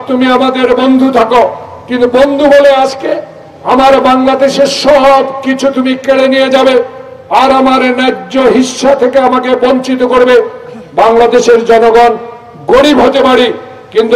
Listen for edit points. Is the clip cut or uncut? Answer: uncut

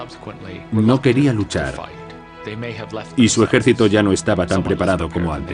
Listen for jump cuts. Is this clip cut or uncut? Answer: cut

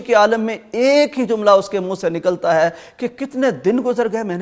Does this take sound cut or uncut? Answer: uncut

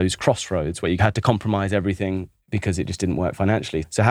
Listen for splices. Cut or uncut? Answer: cut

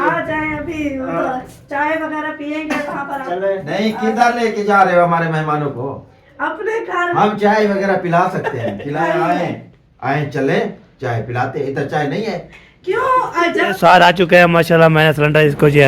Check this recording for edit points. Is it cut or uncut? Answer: cut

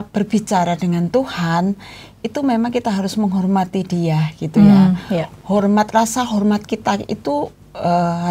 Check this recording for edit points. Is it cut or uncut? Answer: uncut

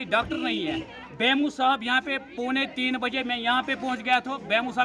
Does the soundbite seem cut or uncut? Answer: uncut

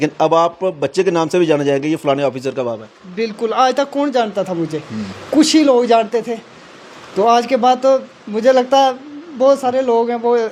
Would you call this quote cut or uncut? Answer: uncut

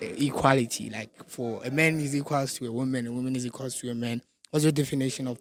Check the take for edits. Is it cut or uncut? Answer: uncut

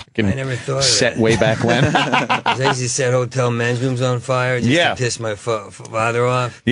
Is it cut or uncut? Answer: uncut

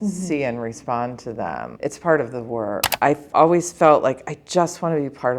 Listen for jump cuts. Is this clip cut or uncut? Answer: cut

